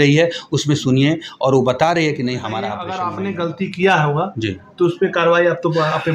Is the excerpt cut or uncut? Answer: cut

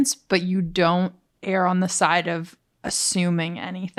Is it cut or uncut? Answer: uncut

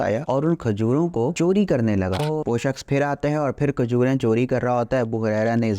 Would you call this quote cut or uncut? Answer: cut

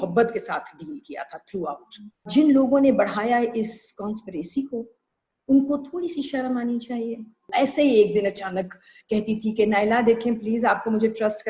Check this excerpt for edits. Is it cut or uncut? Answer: cut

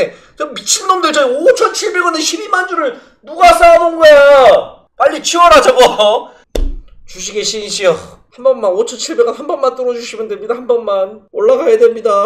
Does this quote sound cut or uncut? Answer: cut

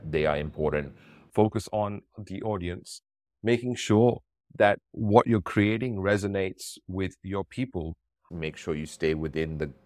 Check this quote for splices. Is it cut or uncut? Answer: cut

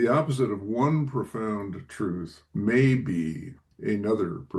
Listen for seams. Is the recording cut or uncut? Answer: uncut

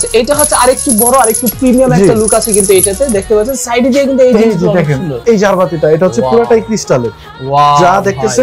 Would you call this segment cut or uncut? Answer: uncut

